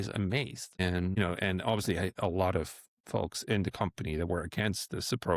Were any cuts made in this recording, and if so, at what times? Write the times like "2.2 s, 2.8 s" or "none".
1.0 s

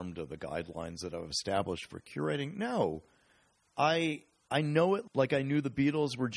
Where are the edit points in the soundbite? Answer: 5.1 s

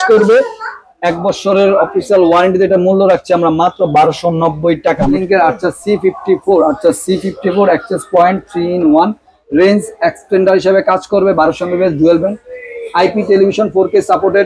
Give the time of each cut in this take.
5.0 s

